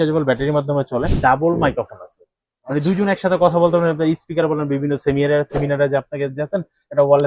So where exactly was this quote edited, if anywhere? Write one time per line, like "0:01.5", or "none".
0:01.1